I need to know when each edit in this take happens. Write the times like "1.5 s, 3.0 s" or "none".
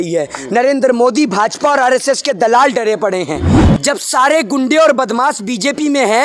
3.6 s